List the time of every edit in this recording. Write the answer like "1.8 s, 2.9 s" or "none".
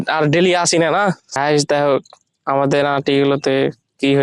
1.2 s